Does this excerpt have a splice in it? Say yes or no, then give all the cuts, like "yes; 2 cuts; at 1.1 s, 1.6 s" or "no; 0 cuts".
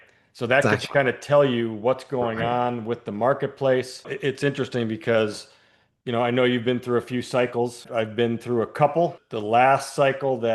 yes; 3 cuts; at 4.1 s, 7.9 s, 9.3 s